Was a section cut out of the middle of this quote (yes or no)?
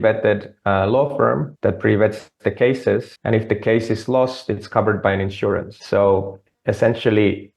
yes